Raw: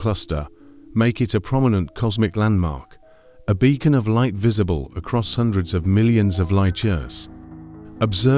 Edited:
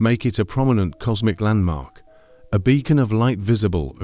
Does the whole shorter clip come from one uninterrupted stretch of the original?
yes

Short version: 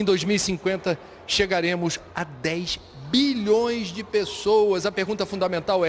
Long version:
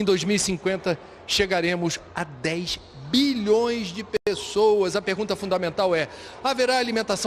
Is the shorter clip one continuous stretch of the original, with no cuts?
no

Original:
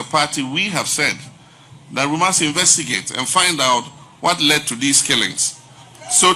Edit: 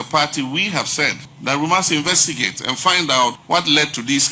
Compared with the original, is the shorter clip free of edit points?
no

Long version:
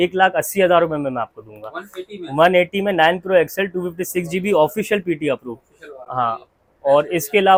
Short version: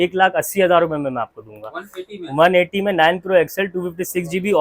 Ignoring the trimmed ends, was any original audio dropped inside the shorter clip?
no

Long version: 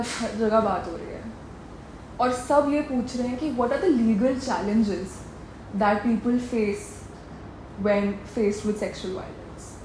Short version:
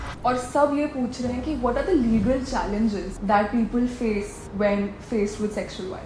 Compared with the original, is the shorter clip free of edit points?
no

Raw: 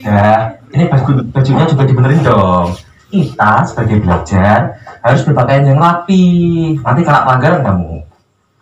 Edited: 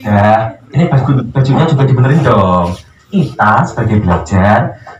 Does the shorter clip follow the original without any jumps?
yes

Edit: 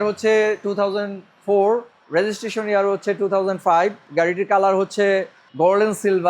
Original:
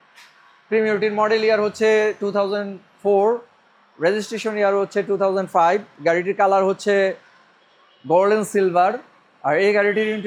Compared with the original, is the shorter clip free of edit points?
no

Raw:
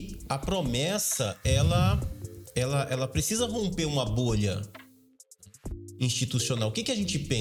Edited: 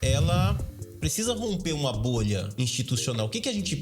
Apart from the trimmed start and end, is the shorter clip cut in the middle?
yes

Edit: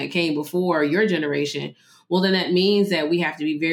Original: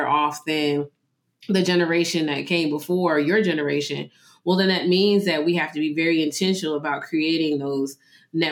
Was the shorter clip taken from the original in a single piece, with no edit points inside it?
yes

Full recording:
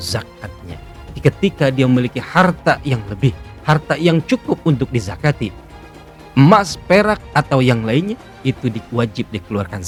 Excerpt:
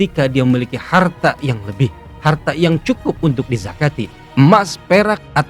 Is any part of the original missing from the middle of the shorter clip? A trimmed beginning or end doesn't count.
yes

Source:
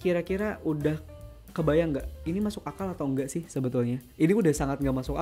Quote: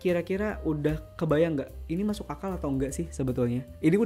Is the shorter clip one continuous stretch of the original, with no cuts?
no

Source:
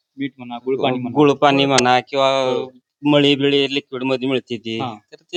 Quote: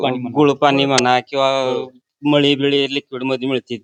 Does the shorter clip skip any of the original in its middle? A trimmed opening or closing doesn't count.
no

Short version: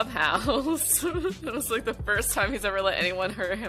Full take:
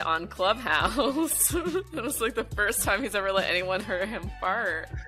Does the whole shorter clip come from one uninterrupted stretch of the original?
yes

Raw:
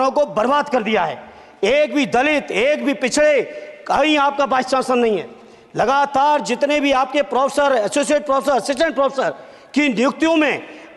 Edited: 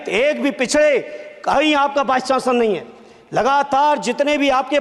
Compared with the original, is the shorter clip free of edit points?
yes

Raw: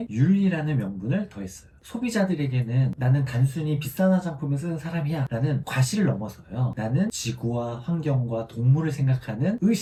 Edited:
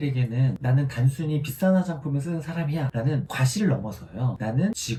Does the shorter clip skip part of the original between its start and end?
no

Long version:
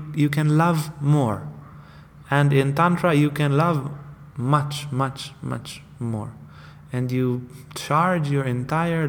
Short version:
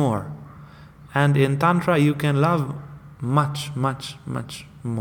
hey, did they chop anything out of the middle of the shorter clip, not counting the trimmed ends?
no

